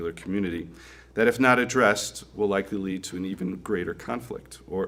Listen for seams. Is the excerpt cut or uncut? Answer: uncut